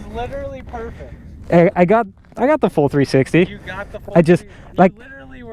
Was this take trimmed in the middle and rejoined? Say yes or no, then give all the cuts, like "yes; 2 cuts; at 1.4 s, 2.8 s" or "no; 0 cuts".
no; 0 cuts